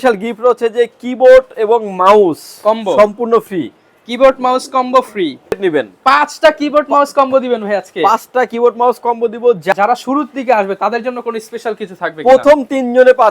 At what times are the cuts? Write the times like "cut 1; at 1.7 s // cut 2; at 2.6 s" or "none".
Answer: cut 1; at 5.6 s // cut 2; at 9.7 s